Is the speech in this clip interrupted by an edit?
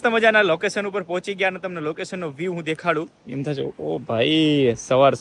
no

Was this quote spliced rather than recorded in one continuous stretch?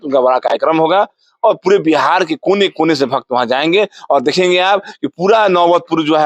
no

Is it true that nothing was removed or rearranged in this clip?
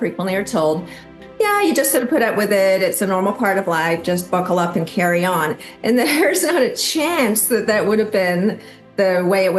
no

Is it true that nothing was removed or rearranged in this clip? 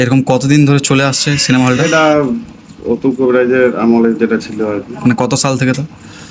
yes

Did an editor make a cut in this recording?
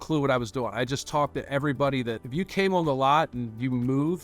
yes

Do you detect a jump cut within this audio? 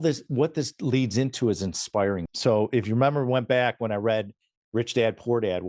yes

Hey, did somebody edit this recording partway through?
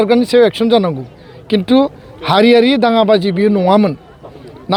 no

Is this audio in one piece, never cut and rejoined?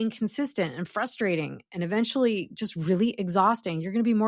yes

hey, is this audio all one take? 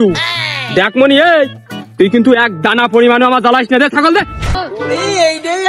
no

